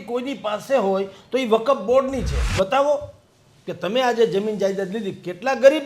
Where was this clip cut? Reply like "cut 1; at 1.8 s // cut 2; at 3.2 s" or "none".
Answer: cut 1; at 2.5 s